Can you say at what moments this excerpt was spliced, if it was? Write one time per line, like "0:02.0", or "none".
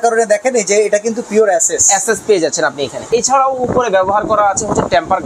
0:03.1